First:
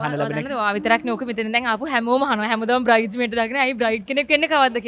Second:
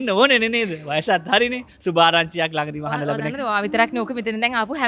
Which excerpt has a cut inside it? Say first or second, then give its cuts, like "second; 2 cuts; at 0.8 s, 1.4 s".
second; 1 cut; at 1.7 s